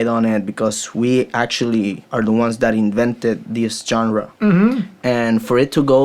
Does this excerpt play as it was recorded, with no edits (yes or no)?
yes